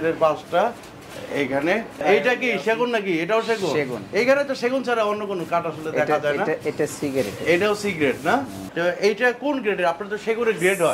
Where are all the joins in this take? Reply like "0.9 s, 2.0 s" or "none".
2.0 s, 8.6 s